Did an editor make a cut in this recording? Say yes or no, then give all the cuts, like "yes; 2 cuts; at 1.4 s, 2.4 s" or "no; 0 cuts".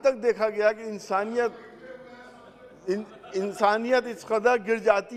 no; 0 cuts